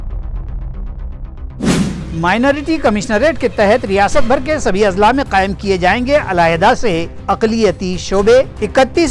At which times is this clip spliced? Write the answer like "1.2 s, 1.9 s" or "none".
1.7 s